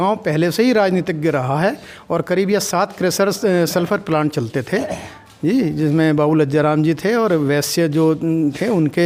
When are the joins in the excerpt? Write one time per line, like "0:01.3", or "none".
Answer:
none